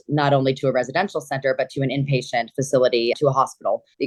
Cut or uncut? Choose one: uncut